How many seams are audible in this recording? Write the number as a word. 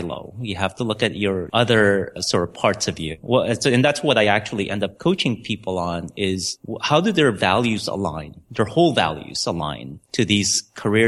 four